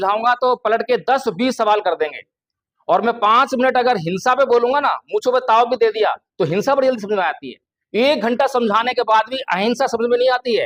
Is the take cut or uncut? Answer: uncut